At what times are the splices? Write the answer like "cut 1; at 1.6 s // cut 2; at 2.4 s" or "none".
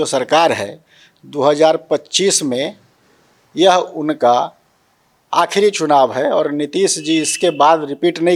none